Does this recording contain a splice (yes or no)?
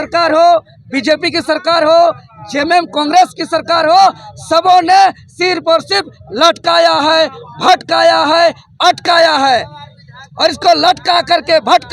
no